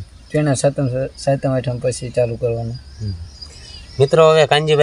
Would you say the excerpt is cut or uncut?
uncut